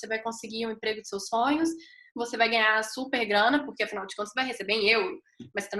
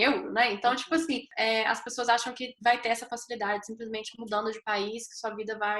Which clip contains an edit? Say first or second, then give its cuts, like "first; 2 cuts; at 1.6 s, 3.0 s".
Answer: second; 1 cut; at 1.3 s